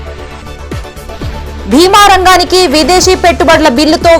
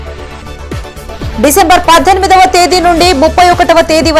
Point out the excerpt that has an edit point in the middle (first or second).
second